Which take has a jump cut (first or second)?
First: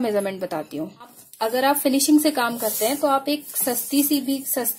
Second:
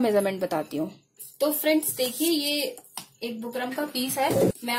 first